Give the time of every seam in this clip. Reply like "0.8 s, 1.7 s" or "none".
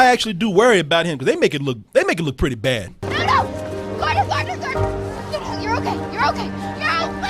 2.9 s